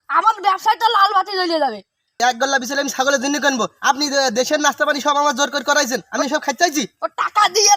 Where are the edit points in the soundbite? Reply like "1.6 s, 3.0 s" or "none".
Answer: 2.0 s